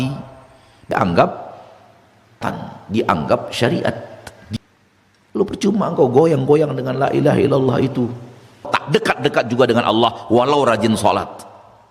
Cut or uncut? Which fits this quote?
cut